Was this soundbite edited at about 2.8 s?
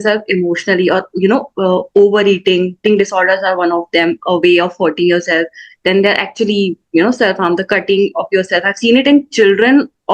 yes; 1 cut; at 2.8 s

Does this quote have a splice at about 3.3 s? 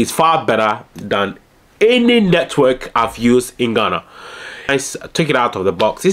no; 1 cut; at 4.7 s

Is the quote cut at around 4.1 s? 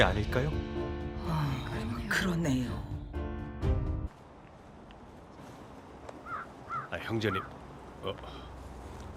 no; 0 cuts

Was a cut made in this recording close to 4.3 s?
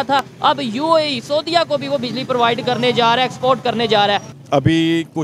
yes; 1 cut; at 4.3 s

